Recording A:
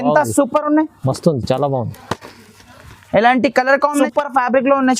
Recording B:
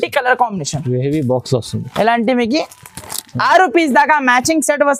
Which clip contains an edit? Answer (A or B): A